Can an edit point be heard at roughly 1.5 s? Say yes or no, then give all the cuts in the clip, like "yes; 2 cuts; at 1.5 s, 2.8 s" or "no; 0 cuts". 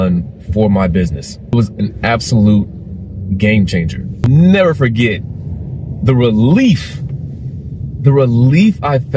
yes; 2 cuts; at 1.5 s, 4.3 s